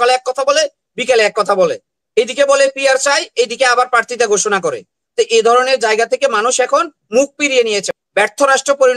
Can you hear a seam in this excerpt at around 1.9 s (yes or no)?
no